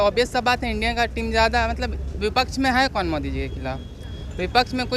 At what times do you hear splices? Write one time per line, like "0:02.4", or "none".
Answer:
none